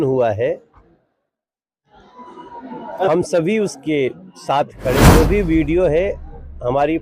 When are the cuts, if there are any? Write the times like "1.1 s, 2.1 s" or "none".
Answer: 5.0 s